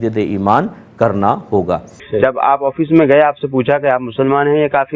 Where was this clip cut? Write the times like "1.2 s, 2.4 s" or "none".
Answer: 2.0 s